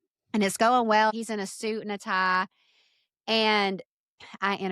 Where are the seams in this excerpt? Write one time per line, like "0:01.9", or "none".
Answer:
0:01.1